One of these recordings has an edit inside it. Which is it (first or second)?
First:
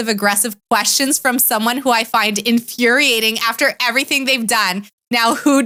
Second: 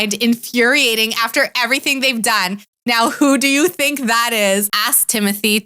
second